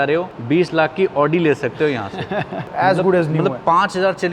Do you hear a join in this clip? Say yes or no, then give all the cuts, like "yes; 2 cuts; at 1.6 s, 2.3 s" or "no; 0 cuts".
yes; 1 cut; at 2.6 s